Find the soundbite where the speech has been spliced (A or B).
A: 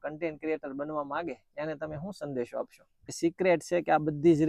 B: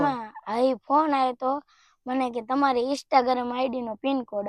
A